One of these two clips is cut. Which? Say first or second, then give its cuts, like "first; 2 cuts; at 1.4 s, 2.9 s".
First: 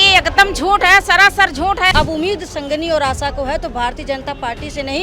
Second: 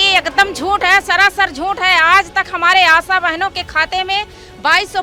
first; 1 cut; at 1.9 s